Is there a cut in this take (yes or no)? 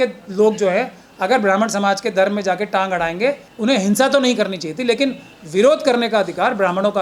no